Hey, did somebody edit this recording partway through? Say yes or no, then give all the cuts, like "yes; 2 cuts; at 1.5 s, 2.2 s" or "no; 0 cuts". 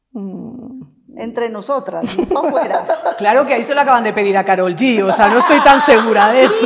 no; 0 cuts